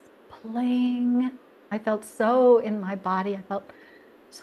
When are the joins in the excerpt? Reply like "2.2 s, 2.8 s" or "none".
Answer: 1.7 s

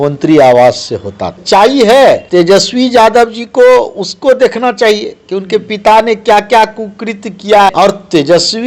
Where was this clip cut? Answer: 1.4 s, 2.2 s, 7.7 s

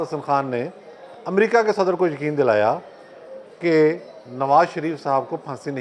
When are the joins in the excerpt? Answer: none

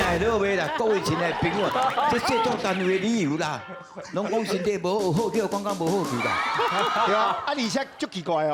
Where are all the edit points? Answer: none

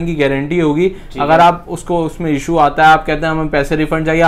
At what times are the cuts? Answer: none

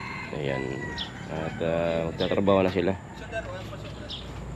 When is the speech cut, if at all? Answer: none

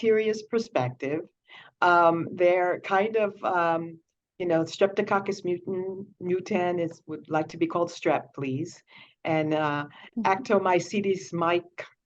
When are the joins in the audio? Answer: none

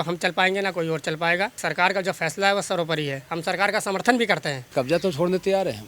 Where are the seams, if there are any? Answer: 1.6 s, 4.7 s

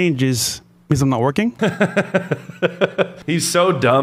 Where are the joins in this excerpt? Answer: 1.6 s, 3.2 s

